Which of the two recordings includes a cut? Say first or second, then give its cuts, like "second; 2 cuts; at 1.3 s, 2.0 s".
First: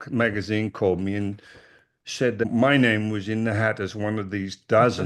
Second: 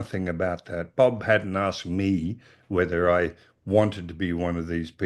first; 1 cut; at 2.5 s